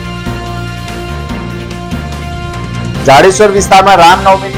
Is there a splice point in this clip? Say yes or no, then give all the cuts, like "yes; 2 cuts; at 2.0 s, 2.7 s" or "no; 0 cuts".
no; 0 cuts